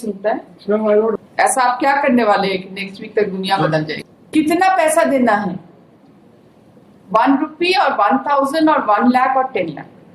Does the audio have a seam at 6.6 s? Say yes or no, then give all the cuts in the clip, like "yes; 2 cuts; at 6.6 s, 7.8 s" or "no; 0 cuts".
no; 2 cuts; at 1.2 s, 4.0 s